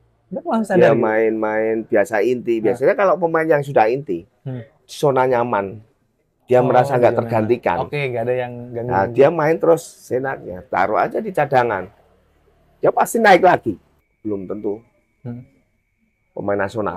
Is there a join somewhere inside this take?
yes; 1 cut; at 14.1 s

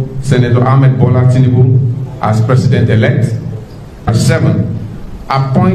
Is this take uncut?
no; 1 cut; at 4.1 s

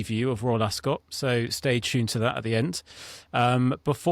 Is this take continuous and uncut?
yes; 0 cuts

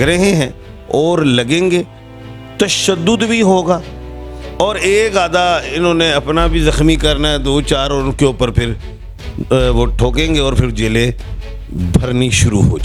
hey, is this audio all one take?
yes; 0 cuts

